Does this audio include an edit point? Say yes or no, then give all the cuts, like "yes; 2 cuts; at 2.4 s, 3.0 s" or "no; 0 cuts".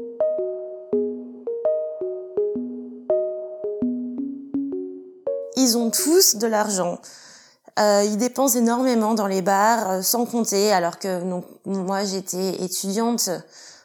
no; 0 cuts